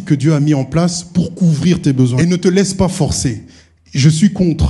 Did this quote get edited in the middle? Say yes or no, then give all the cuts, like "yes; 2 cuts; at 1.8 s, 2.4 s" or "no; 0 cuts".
yes; 1 cut; at 2.1 s